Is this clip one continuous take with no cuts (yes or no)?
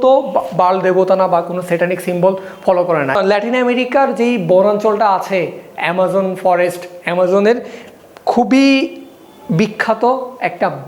no